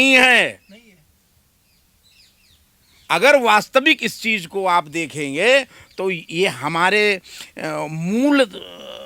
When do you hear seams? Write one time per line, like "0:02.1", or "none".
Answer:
none

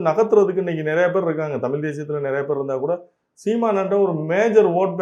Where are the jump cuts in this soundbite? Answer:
none

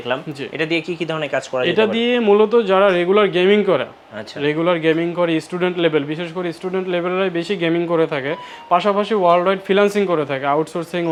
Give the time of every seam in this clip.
none

